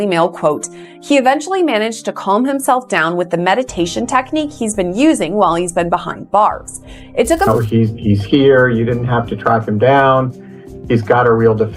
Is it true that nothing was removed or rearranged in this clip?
no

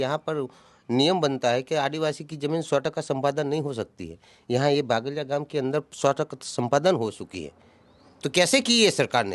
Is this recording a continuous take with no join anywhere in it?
yes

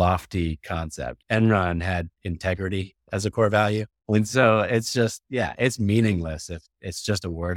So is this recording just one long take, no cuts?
no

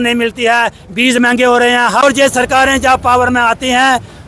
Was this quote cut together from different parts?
yes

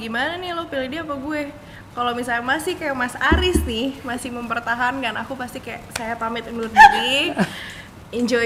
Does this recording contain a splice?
no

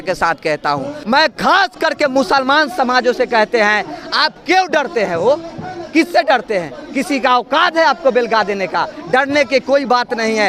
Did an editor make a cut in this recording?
yes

